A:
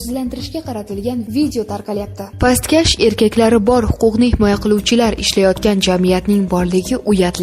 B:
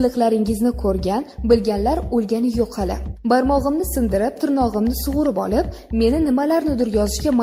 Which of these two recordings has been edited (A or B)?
A